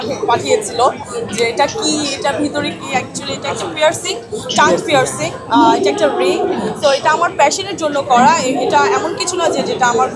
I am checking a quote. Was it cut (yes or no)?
no